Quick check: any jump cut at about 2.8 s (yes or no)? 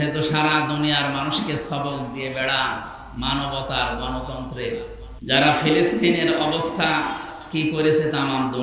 no